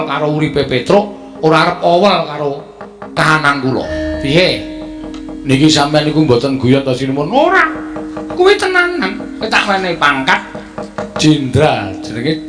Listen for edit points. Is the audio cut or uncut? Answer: cut